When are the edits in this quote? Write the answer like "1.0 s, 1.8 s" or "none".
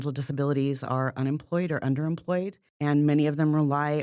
2.6 s